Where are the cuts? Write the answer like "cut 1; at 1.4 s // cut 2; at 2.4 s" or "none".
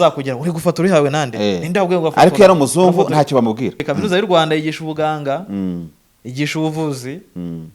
cut 1; at 3.9 s